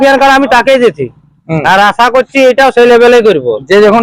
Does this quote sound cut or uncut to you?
uncut